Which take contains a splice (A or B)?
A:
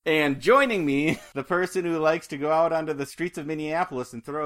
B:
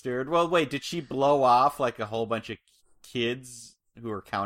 A